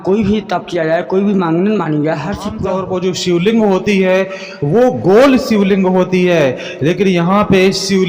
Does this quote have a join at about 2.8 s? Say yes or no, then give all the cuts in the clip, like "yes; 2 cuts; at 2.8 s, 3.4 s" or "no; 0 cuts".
yes; 1 cut; at 2.8 s